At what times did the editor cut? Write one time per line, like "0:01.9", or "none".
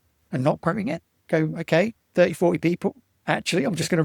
0:03.1